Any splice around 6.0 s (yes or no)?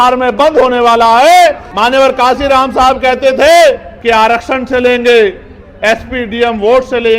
no